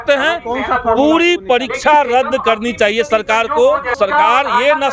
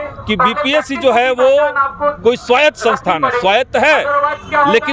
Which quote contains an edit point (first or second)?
first